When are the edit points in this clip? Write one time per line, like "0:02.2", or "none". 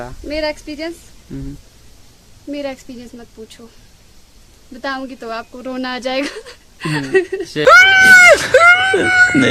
none